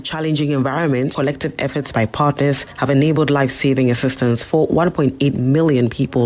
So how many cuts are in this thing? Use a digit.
1